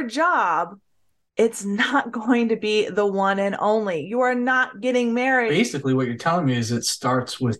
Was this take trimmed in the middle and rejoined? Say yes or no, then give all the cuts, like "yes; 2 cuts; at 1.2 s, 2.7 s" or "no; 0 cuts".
yes; 1 cut; at 5.5 s